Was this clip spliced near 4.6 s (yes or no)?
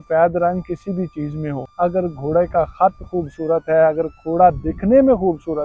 no